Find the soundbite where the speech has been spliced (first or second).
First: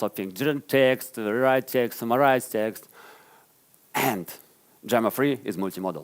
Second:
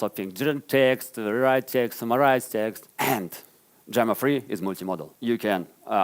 second